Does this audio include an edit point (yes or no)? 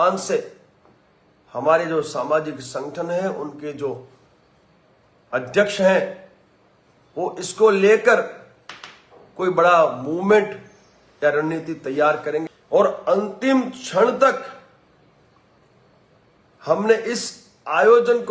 yes